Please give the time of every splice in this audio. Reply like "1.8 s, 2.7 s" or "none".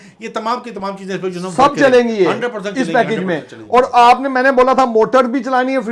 none